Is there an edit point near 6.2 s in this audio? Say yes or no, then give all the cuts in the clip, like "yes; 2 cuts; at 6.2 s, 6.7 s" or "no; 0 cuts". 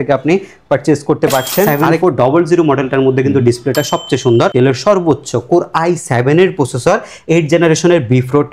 no; 2 cuts; at 1.8 s, 4.5 s